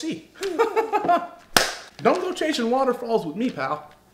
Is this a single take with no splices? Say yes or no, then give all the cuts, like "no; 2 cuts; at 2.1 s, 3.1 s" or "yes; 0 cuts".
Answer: no; 1 cut; at 1.8 s